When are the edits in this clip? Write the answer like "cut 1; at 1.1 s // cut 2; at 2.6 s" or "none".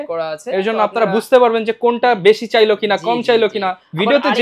none

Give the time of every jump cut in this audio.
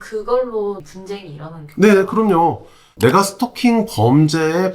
cut 1; at 2.8 s

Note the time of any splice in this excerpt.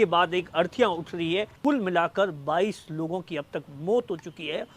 cut 1; at 1.5 s

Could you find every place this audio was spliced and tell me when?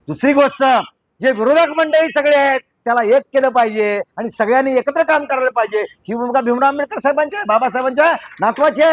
none

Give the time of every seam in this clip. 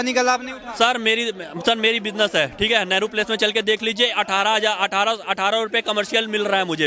none

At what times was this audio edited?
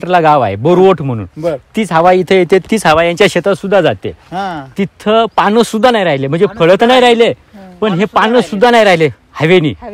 none

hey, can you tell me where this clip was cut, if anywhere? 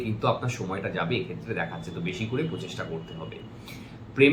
none

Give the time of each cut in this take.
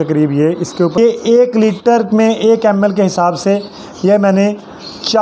cut 1; at 1.0 s

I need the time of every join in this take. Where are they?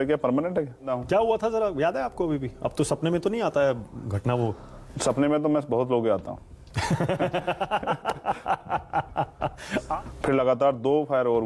cut 1; at 1.0 s // cut 2; at 9.9 s

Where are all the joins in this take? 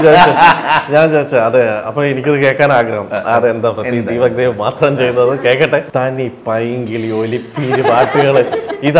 cut 1; at 5.9 s

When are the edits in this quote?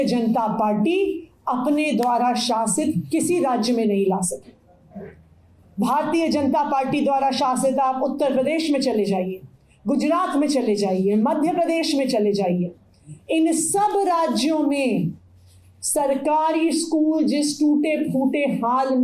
none

